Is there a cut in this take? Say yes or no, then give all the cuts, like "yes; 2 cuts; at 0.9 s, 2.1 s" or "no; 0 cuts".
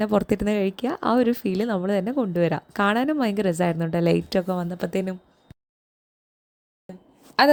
no; 0 cuts